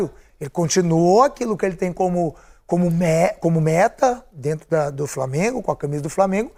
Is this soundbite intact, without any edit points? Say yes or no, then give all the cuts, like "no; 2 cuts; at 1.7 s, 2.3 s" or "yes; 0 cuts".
yes; 0 cuts